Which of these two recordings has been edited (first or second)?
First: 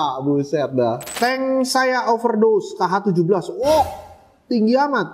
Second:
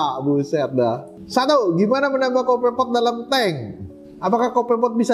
first